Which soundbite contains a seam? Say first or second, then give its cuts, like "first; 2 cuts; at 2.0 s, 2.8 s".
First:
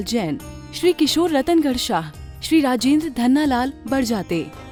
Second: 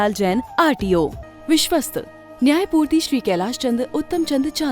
second; 1 cut; at 1.2 s